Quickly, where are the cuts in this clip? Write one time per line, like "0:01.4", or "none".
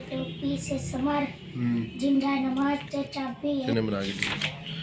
0:03.7